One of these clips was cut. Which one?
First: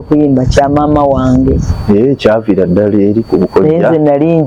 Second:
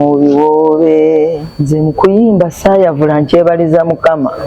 second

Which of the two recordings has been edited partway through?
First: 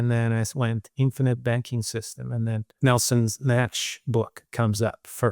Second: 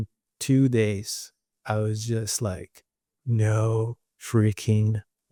first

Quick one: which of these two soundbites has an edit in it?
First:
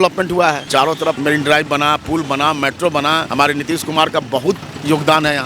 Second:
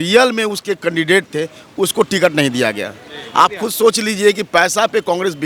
first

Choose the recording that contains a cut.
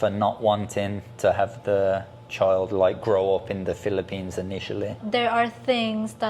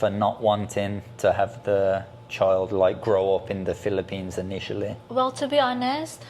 first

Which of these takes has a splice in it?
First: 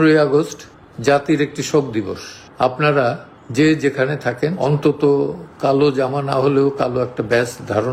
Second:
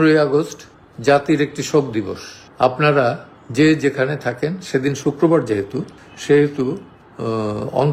first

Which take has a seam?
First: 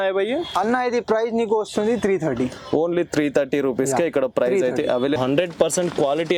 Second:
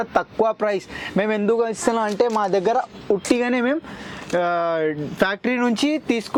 first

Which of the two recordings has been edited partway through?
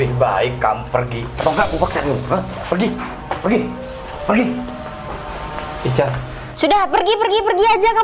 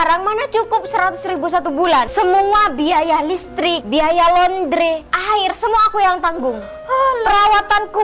second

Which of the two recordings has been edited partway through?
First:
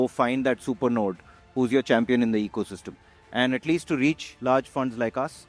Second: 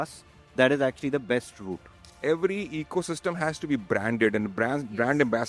second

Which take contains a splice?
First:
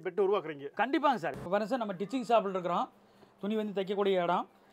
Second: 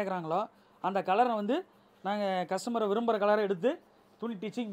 first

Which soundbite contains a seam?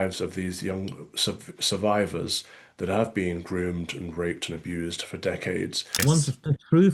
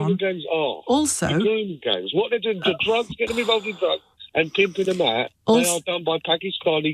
first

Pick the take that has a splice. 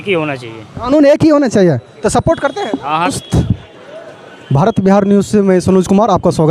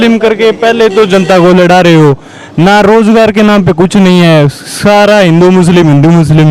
first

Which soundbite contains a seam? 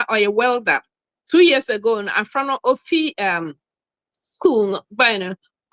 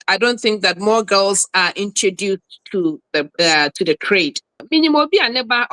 second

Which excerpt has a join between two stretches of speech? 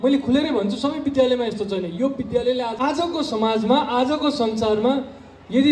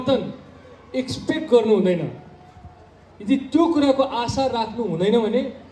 first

